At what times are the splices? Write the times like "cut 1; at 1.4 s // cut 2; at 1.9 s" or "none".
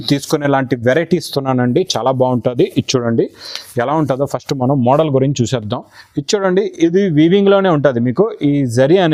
none